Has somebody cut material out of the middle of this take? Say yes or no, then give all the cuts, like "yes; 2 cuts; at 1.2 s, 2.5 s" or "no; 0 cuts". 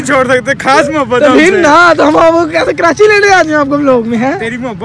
yes; 1 cut; at 1.8 s